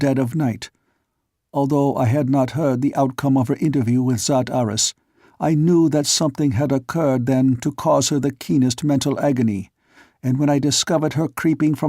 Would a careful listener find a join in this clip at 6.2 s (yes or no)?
yes